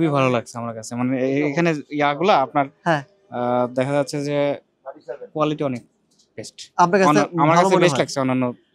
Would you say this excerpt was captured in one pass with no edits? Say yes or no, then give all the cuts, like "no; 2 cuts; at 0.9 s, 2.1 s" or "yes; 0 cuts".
yes; 0 cuts